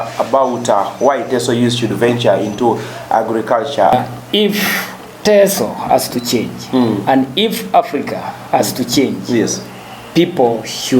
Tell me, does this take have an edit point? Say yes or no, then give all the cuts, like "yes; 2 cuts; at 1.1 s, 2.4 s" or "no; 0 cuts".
yes; 1 cut; at 3.9 s